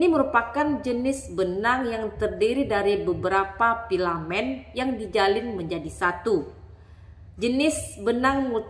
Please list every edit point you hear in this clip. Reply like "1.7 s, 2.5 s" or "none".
none